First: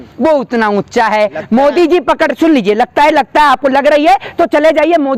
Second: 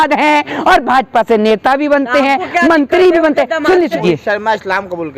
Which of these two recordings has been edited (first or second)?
second